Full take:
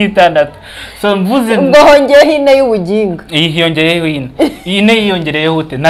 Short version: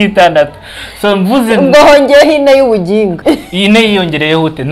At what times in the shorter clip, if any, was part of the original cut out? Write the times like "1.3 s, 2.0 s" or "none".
3.2 s